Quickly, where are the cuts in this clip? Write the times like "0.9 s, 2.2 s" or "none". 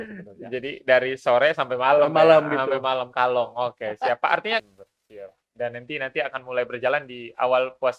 4.6 s